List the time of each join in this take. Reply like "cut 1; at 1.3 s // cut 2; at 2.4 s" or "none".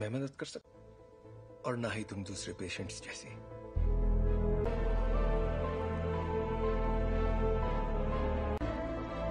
cut 1; at 4.7 s